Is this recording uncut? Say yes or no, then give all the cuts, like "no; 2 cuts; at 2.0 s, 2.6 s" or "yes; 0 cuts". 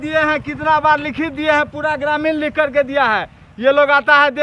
yes; 0 cuts